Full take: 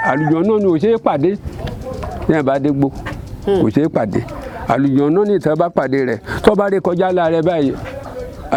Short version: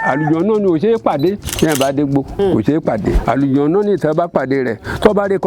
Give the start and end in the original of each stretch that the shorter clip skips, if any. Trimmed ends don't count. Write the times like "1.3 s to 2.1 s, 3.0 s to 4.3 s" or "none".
1.5 s to 2.1 s, 3.0 s to 3.4 s, 4.3 s to 4.6 s